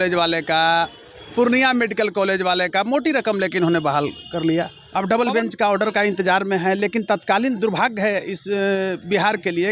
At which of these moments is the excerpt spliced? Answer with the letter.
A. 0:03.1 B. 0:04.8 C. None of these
B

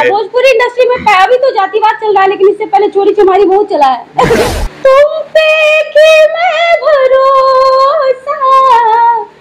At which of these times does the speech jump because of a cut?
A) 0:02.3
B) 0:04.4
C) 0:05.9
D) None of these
B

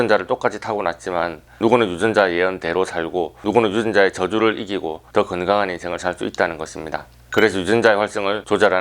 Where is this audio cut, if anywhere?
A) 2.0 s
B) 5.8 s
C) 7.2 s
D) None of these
C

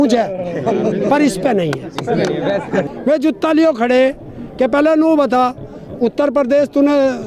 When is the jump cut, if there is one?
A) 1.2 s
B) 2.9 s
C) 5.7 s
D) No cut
B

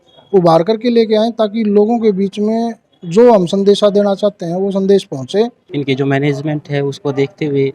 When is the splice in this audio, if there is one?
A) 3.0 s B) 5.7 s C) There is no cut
B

